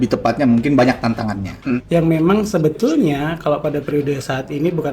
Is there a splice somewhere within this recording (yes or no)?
yes